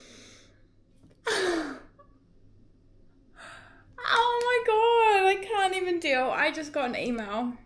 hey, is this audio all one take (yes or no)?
yes